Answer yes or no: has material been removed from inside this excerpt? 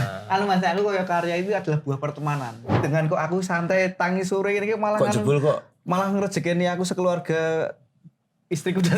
yes